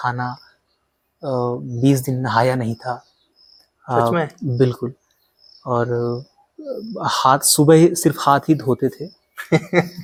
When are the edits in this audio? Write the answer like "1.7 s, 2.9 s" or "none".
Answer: none